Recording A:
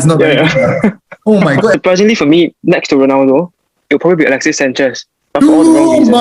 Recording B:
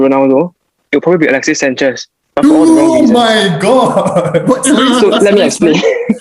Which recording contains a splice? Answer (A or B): A